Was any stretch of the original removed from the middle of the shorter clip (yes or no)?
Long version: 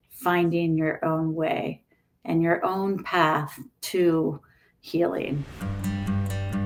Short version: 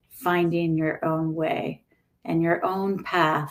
no